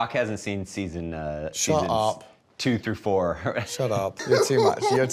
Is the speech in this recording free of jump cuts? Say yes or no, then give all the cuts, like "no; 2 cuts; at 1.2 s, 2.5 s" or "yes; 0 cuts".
no; 1 cut; at 4.2 s